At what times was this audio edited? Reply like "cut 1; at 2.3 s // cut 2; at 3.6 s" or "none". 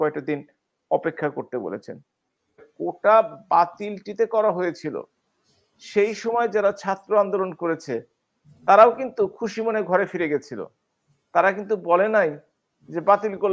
cut 1; at 2.6 s